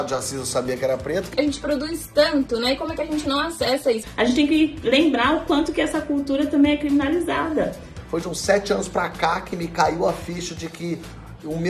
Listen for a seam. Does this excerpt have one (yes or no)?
yes